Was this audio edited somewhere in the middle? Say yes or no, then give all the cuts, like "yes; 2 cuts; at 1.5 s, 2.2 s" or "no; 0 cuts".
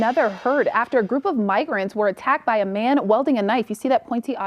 yes; 1 cut; at 1.8 s